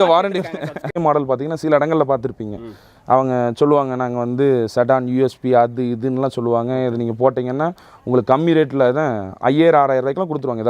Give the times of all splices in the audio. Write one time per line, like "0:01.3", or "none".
0:01.0